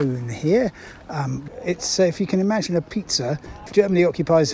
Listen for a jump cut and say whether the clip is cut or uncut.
cut